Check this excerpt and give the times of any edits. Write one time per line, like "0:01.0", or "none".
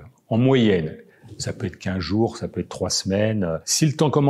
none